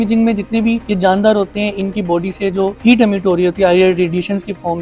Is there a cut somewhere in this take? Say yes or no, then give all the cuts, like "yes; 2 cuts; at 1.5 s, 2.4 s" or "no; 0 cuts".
yes; 2 cuts; at 0.9 s, 2.8 s